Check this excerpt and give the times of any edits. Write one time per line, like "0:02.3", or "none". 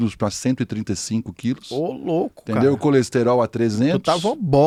none